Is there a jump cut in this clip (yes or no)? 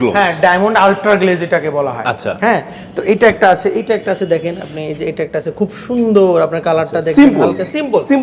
no